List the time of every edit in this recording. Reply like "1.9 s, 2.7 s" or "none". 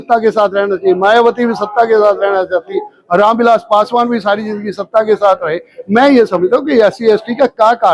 none